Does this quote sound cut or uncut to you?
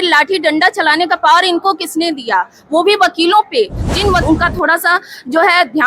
cut